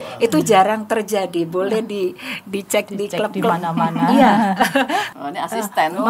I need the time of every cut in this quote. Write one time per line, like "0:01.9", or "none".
0:05.1

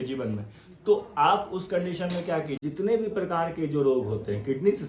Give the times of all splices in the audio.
0:02.6

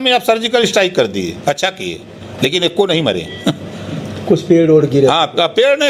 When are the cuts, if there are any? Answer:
none

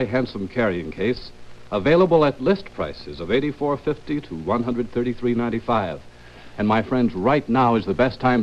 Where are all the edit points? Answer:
0:02.1

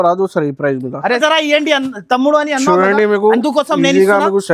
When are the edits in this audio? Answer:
0:01.2

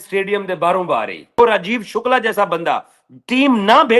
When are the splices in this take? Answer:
0:01.4

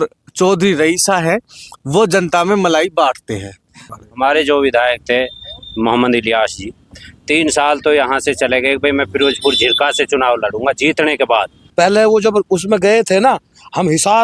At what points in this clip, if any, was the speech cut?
0:03.9
0:11.6

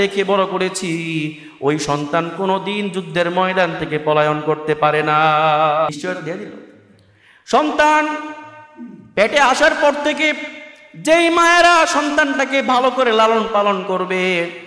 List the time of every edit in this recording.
0:05.9

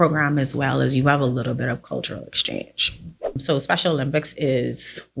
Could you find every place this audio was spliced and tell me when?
0:03.4

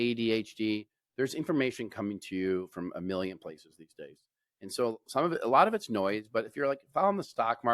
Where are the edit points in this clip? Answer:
none

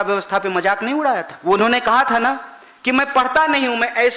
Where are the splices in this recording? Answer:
0:01.3

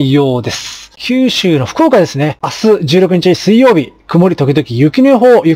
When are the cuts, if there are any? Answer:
0:00.9
0:02.4

